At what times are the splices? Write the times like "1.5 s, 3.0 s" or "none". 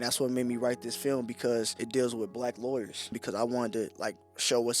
1.8 s, 3.2 s